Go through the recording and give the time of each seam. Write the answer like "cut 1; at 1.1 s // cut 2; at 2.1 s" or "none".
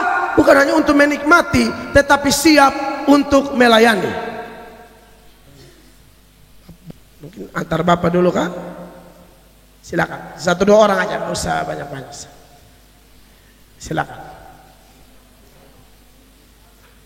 cut 1; at 6.9 s